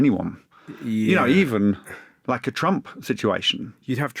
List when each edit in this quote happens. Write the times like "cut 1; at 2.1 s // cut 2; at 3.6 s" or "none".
none